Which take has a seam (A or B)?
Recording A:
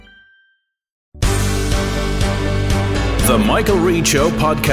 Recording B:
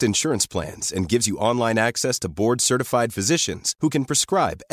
A